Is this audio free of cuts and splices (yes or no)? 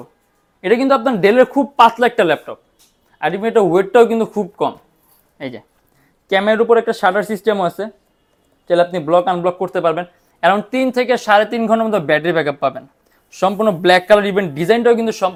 yes